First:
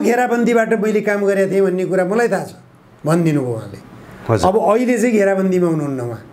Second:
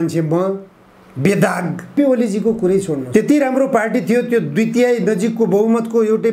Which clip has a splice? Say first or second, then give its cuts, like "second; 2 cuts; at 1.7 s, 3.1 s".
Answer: second; 1 cut; at 1.9 s